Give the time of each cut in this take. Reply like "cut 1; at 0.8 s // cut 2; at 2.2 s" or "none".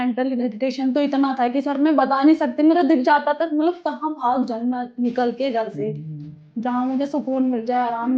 none